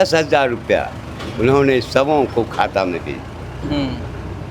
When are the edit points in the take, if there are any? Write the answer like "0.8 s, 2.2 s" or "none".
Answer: none